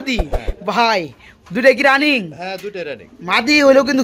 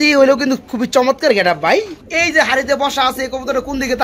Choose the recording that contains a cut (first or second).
second